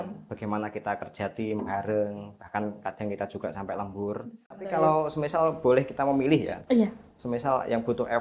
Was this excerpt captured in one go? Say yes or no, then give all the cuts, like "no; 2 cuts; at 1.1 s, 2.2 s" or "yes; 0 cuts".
no; 1 cut; at 4.7 s